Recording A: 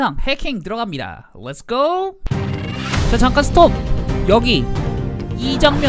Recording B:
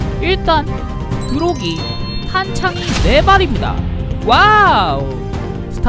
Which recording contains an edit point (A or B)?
A